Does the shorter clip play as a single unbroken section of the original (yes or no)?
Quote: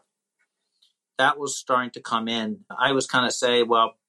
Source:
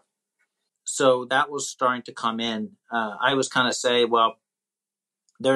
no